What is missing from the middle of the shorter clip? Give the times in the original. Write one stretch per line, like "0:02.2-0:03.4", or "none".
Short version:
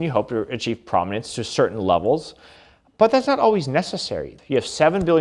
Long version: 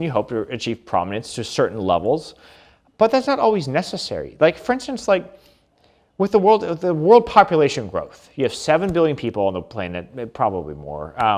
0:04.2-0:08.1